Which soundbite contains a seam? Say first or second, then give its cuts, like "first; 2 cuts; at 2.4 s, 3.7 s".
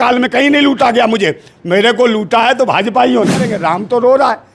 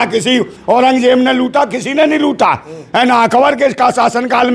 first; 1 cut; at 3.5 s